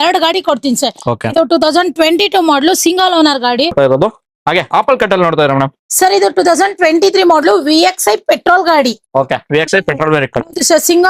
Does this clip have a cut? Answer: yes; 1 cut; at 3.7 s

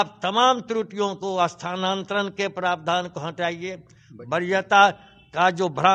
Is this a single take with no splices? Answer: yes; 0 cuts

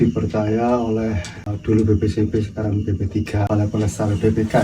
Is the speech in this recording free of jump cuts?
no; 2 cuts; at 1.5 s, 3.5 s

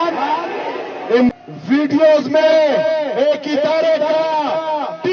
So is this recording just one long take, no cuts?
no; 1 cut; at 1.3 s

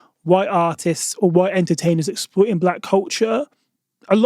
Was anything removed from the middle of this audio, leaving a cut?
no; 0 cuts

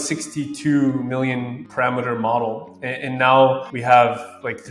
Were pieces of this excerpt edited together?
no; 0 cuts

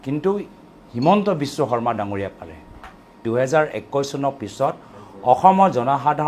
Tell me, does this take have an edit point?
yes; 1 cut; at 3.2 s

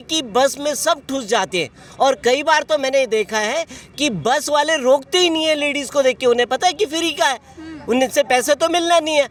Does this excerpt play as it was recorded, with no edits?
yes; 0 cuts

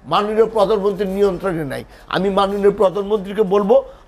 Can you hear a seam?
no; 0 cuts

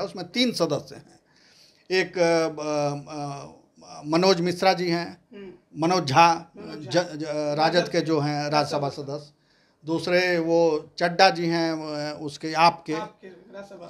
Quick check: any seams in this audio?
no; 0 cuts

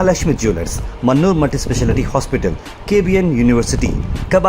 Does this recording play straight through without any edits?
yes; 0 cuts

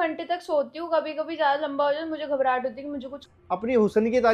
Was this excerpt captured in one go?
no; 1 cut; at 3.3 s

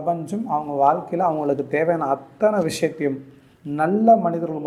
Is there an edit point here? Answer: no; 0 cuts

